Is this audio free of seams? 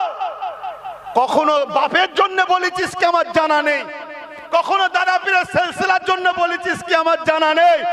yes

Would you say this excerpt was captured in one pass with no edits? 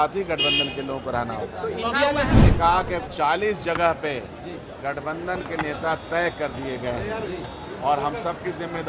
no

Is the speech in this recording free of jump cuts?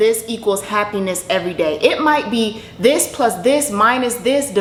yes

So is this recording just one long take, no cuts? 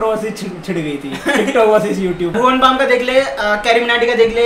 no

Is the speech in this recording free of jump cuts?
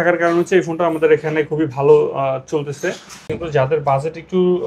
no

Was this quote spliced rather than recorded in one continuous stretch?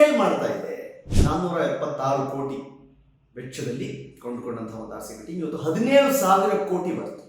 yes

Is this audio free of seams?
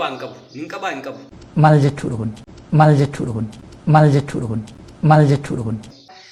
yes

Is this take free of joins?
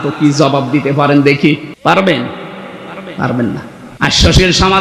no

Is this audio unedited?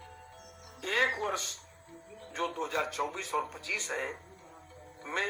yes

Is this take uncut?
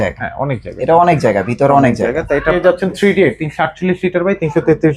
no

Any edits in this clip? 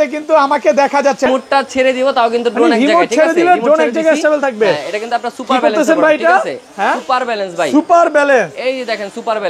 yes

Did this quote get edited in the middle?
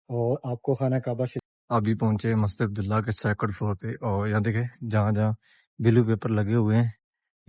yes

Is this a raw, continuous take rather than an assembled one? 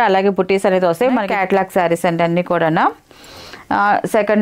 no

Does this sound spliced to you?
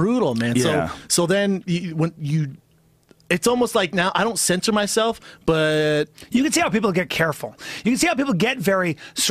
yes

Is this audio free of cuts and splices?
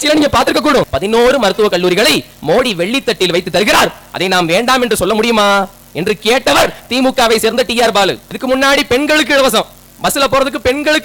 no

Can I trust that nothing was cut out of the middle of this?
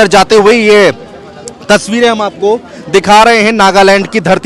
yes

